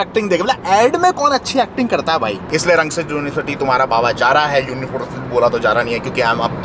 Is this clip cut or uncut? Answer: uncut